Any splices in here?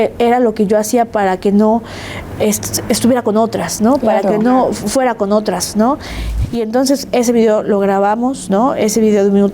yes; 1 cut; at 6.2 s

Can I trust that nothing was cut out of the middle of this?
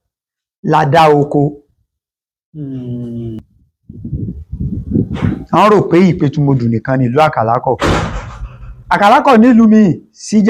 no; 1 cut; at 3.4 s

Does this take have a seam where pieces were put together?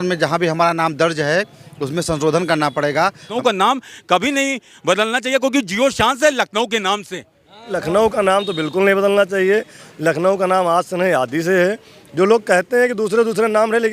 yes; 2 cuts; at 3.3 s, 7.8 s

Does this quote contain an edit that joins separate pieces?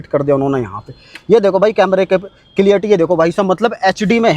no; 0 cuts

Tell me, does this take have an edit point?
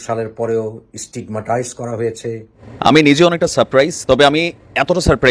yes; 1 cut; at 2.7 s

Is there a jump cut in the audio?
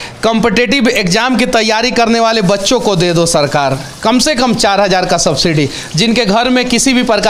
no; 0 cuts

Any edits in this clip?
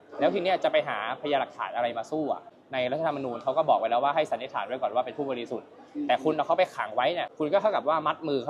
yes; 2 cuts; at 2.5 s, 7.3 s

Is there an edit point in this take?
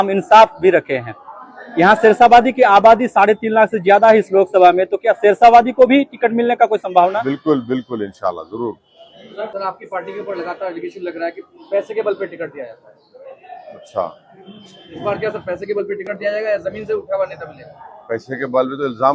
yes; 1 cut; at 9.5 s

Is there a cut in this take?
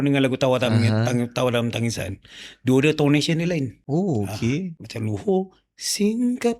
yes; 2 cuts; at 3.8 s, 4.8 s

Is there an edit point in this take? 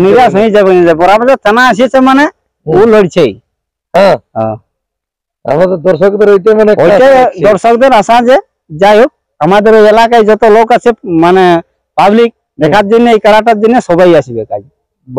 no; 0 cuts

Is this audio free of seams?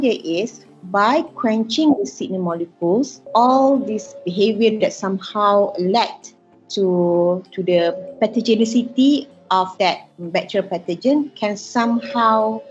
yes; 0 cuts

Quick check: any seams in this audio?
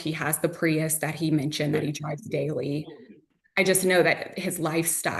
yes; 1 cut; at 3.3 s

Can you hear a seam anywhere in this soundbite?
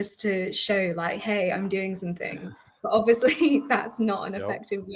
no; 0 cuts

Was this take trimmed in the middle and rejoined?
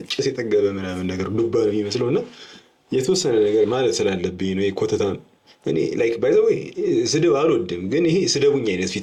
no; 0 cuts

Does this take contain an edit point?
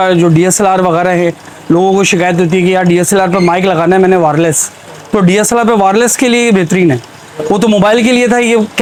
no; 0 cuts

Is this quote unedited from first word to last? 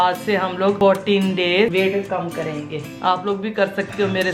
no; 2 cuts; at 0.8 s, 1.7 s

